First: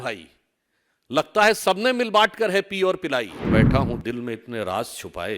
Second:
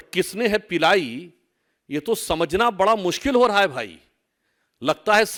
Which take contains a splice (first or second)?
first